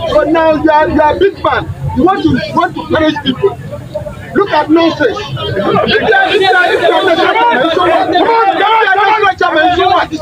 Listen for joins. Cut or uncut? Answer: uncut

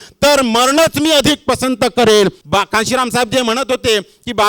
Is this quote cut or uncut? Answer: cut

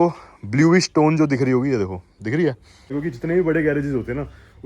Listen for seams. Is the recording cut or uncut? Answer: cut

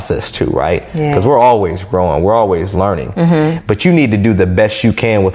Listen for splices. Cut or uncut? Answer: uncut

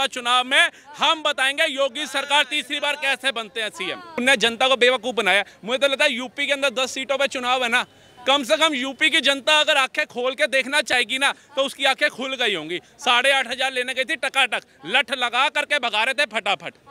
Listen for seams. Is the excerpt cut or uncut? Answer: cut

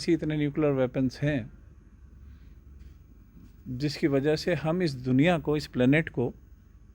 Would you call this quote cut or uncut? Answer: uncut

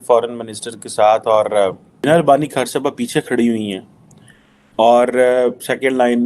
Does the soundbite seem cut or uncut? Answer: cut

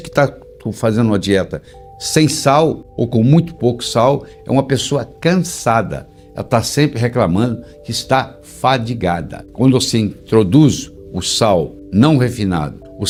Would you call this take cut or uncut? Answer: uncut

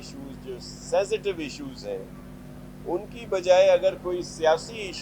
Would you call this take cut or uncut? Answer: uncut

